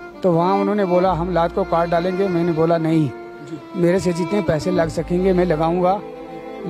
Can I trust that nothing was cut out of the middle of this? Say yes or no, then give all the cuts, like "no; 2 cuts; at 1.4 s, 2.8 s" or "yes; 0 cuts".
yes; 0 cuts